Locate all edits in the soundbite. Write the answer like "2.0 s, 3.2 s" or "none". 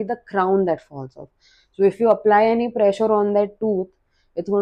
none